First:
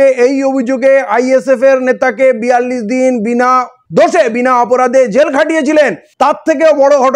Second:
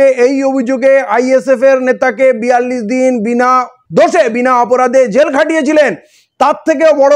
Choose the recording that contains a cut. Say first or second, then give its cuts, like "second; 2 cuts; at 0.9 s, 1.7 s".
first; 1 cut; at 6.0 s